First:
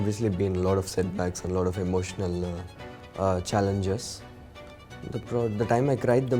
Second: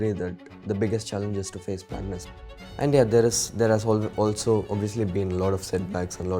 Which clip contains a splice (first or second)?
second